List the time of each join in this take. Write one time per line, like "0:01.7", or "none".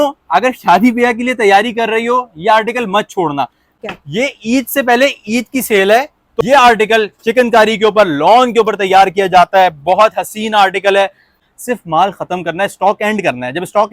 0:03.8
0:06.5
0:11.5